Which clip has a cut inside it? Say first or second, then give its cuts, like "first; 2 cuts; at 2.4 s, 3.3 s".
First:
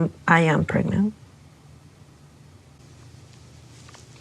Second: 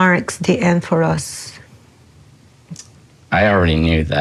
first; 1 cut; at 2.9 s